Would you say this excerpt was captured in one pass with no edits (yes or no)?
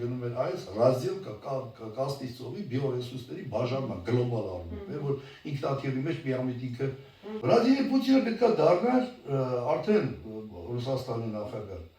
no